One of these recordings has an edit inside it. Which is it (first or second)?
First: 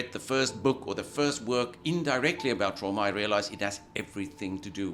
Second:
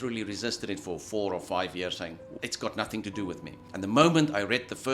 second